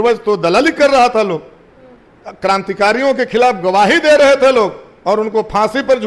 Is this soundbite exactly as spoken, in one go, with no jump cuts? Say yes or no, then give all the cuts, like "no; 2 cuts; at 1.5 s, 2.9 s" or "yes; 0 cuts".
yes; 0 cuts